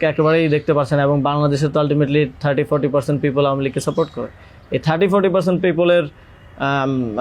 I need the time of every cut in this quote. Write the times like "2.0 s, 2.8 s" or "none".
none